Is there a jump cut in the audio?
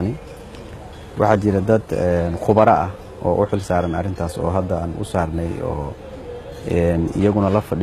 yes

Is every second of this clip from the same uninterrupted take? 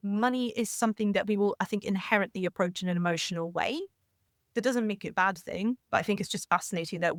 yes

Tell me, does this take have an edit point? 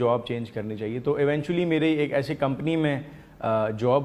no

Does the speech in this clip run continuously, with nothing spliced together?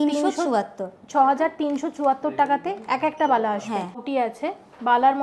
no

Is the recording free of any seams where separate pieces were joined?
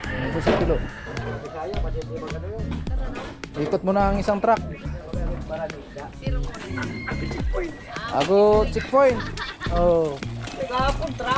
yes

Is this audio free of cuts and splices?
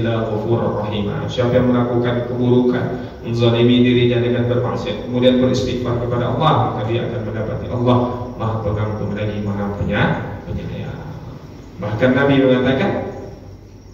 yes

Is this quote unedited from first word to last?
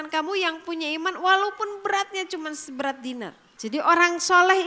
no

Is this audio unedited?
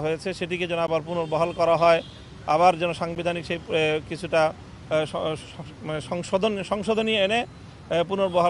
yes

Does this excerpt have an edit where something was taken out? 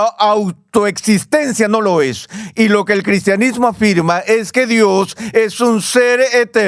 no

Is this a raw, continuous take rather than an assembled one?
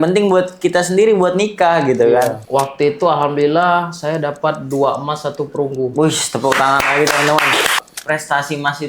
no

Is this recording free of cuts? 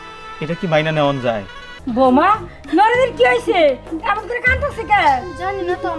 no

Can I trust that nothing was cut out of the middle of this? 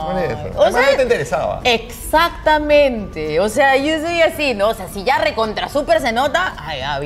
yes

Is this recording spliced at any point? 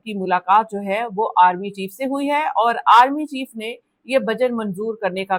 no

